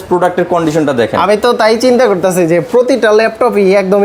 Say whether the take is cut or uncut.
uncut